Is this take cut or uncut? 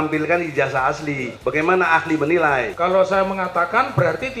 cut